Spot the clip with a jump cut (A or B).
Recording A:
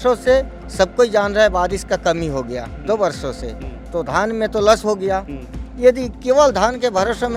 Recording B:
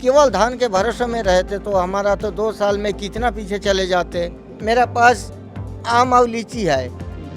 B